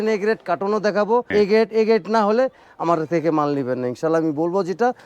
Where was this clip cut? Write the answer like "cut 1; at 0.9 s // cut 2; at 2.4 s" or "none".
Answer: cut 1; at 1.3 s